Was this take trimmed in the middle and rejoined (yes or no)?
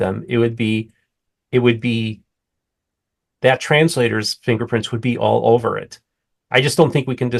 no